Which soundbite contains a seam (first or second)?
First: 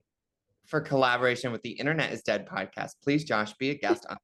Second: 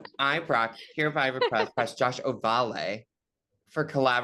second